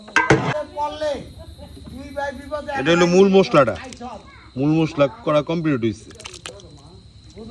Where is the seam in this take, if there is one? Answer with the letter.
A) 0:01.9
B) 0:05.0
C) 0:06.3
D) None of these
D